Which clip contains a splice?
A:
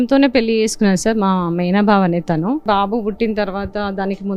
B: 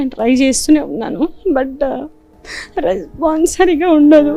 A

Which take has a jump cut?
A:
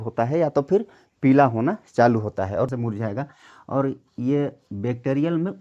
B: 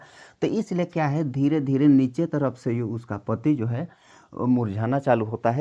A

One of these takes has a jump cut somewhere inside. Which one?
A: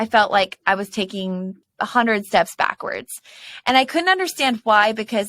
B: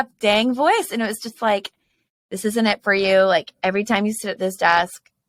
A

